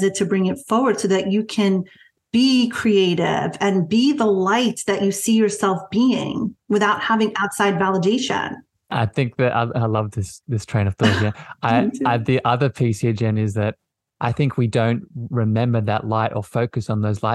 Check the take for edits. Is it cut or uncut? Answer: uncut